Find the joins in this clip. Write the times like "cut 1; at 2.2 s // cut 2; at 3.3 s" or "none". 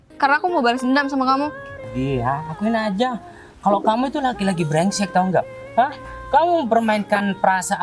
cut 1; at 1.9 s